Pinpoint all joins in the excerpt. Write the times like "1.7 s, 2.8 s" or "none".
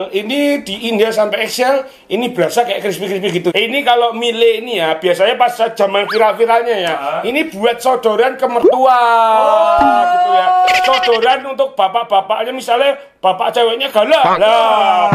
3.5 s